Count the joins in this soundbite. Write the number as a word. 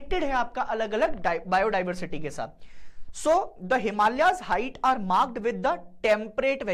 zero